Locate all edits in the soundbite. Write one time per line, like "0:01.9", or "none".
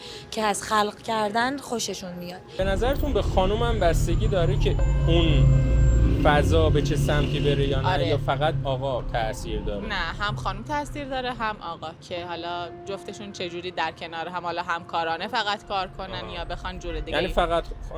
0:02.6